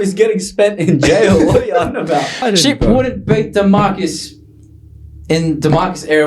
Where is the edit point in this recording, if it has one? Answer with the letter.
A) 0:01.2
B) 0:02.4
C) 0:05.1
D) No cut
B